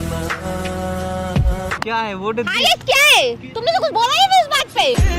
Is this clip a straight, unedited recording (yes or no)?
no